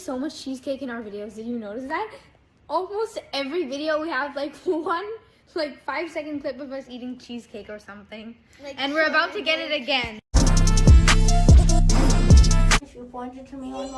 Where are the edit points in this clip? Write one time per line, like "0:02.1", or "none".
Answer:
0:10.3
0:12.8